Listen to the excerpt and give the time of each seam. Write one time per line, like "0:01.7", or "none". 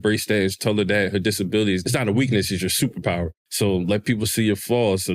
0:01.8
0:03.4